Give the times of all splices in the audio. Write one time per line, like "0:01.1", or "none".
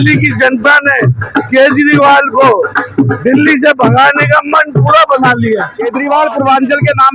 0:05.8